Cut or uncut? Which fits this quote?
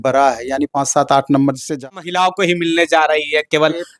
cut